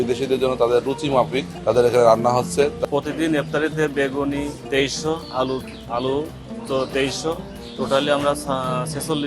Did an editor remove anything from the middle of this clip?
yes; 3 cuts; at 1.5 s, 2.8 s, 4.6 s

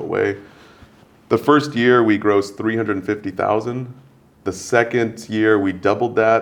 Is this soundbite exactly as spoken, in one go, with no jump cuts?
yes; 0 cuts

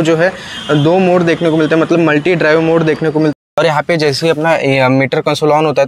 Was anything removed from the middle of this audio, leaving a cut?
yes; 1 cut; at 3.3 s

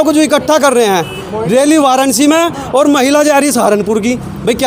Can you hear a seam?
no; 0 cuts

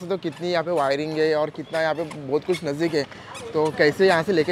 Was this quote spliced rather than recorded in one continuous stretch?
no; 0 cuts

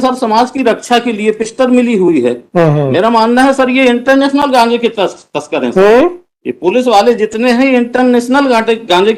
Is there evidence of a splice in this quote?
no; 0 cuts

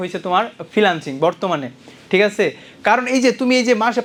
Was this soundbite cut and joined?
no; 0 cuts

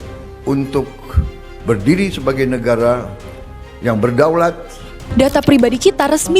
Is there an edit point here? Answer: yes; 1 cut; at 5.0 s

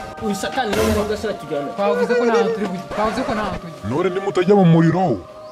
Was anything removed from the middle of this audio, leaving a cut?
no; 0 cuts

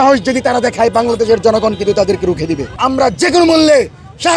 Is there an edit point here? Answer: yes; 1 cut; at 2.7 s

